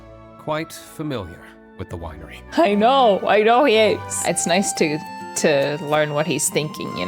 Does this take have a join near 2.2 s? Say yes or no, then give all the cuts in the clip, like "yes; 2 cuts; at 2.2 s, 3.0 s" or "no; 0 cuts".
no; 1 cut; at 4.1 s